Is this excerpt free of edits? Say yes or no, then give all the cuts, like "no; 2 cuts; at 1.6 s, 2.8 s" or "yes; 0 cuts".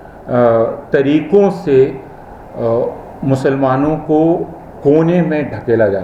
yes; 0 cuts